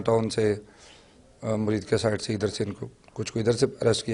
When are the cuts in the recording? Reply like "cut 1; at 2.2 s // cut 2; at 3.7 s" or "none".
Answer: none